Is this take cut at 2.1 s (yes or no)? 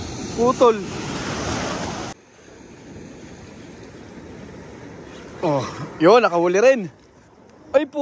yes